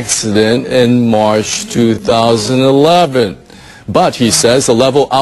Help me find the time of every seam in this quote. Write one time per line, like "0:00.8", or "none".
0:01.6